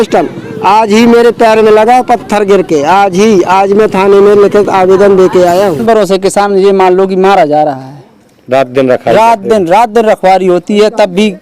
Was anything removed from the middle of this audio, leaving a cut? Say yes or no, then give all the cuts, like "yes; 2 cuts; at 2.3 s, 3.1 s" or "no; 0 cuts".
yes; 1 cut; at 5.8 s